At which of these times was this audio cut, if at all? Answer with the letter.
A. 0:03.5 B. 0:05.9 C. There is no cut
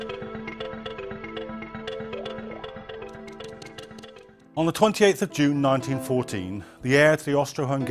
A